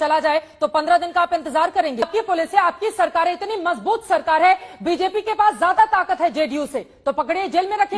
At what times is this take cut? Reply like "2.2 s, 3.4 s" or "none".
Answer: 2.1 s